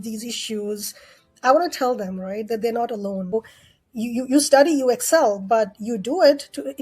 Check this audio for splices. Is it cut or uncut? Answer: cut